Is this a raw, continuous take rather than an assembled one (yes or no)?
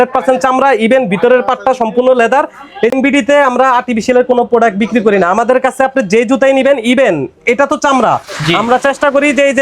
no